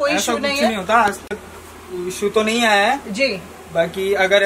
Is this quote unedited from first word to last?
yes; 0 cuts

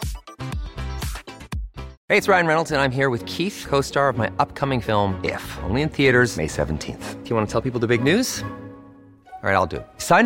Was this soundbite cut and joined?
yes; 1 cut; at 1.9 s

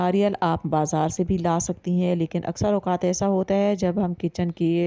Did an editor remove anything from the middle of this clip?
no; 0 cuts

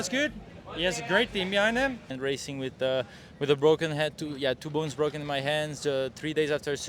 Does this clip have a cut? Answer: yes; 1 cut; at 2.1 s

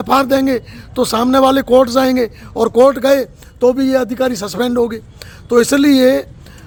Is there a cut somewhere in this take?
no; 0 cuts

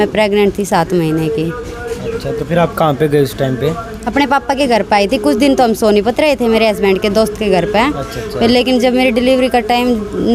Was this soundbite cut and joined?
no; 0 cuts

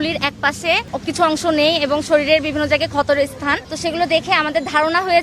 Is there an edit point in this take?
yes; 2 cuts; at 0.9 s, 3.7 s

